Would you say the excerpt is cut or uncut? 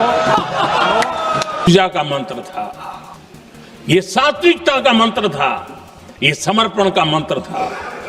cut